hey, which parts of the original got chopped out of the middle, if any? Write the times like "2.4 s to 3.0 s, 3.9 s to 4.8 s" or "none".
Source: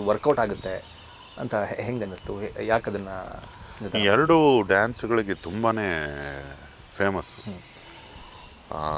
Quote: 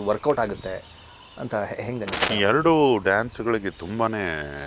2.2 s to 3.8 s